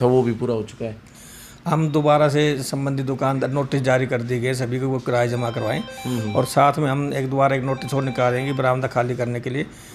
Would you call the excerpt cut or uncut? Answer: uncut